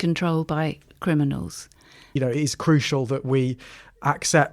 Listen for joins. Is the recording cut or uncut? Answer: cut